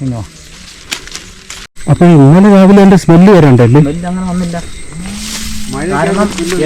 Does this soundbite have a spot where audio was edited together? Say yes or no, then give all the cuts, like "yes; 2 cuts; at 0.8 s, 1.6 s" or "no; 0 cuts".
yes; 1 cut; at 1.7 s